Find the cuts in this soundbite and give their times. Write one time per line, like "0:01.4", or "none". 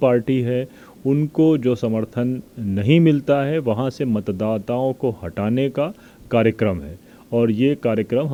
none